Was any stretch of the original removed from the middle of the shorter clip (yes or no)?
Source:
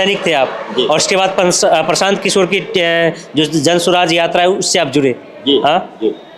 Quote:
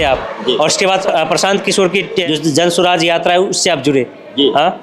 yes